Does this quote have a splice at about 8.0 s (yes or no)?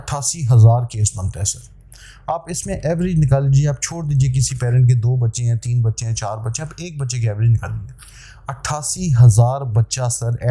no